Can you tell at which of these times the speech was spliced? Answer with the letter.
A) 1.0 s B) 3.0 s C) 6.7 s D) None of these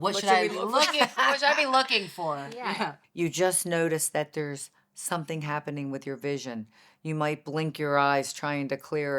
B